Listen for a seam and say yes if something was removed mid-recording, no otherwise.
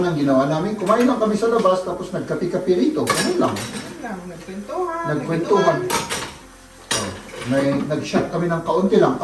no